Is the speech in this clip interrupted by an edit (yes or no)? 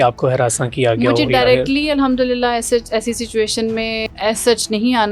yes